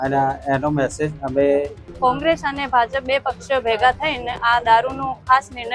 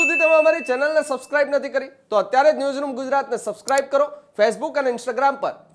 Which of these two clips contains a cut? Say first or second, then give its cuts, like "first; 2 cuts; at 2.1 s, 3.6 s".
first; 1 cut; at 1.9 s